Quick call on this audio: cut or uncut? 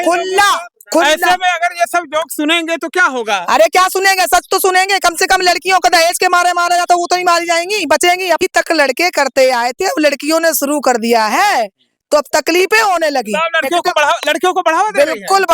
cut